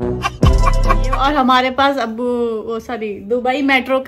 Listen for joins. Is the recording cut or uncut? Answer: cut